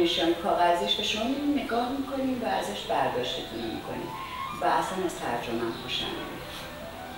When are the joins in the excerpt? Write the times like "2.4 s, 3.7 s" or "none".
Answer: none